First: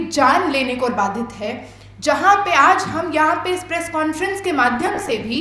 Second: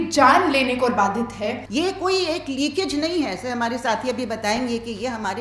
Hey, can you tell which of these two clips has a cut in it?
second; 1 cut; at 1.6 s

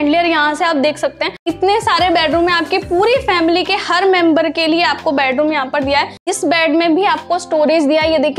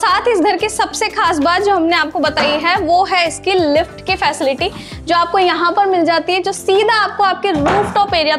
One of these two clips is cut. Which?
first; 2 cuts; at 1.5 s, 6.3 s

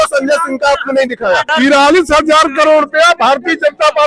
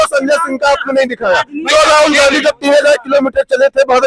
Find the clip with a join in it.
first; 1 cut; at 1.5 s

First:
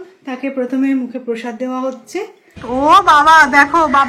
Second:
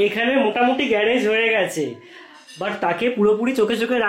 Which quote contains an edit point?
first; 1 cut; at 2.5 s

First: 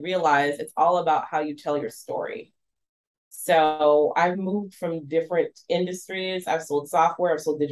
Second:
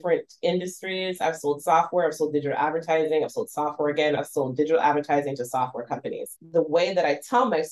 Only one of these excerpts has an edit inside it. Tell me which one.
second; 2 cuts; at 4.2 s, 6.3 s

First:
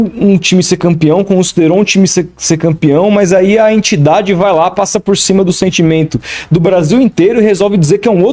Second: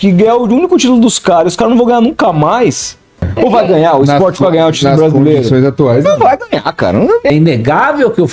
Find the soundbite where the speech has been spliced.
second; 2 cuts; at 3.2 s, 7.3 s

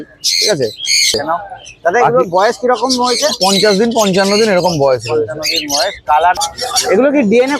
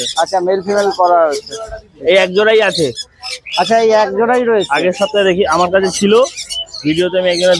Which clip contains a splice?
first; 2 cuts; at 1.2 s, 6.4 s

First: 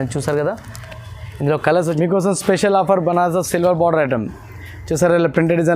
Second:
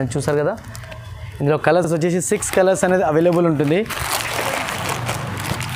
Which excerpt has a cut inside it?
first; 1 cut; at 1.8 s

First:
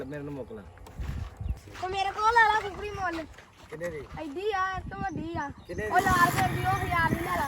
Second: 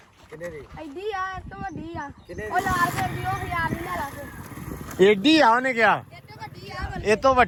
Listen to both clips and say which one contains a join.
first; 1 cut; at 1.6 s

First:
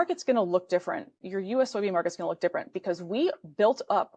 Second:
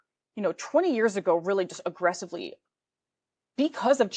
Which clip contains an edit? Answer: first; 1 cut; at 1.2 s

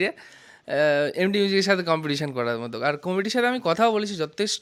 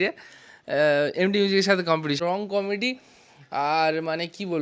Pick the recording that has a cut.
second; 1 cut; at 2.2 s

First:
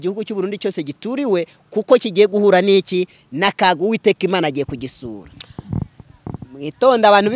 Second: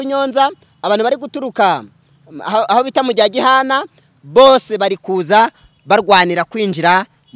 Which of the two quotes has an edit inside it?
first; 1 cut; at 5.5 s

